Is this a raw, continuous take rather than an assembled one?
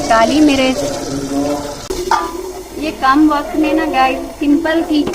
no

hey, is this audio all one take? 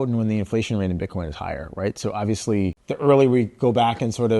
no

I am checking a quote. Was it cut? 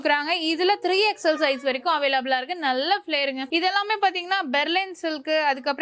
no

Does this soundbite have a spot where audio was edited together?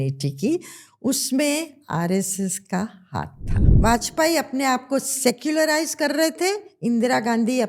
yes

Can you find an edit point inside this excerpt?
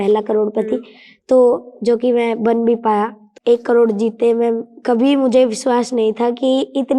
yes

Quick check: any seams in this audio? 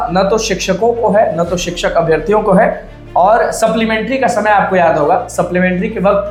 no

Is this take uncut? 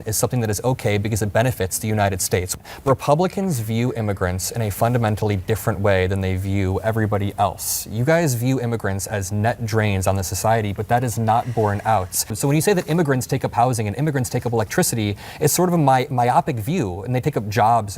no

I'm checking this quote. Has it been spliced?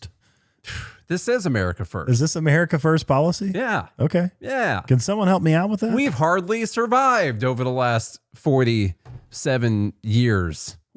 no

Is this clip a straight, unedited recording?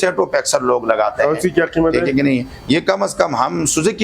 yes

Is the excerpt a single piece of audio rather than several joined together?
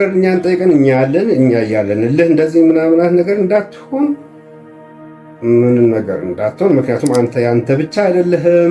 yes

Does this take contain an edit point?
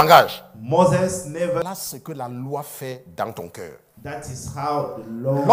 yes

